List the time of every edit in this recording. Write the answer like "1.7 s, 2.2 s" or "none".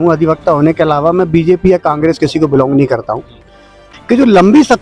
3.9 s